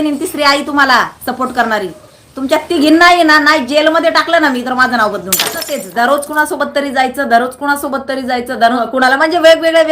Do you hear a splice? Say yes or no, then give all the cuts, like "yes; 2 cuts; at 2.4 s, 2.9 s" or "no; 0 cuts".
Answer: yes; 2 cuts; at 5.8 s, 8.8 s